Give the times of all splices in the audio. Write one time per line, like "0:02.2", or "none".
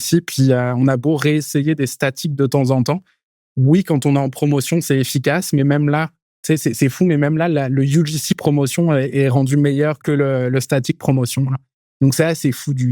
0:10.0